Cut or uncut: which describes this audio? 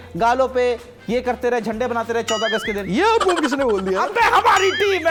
uncut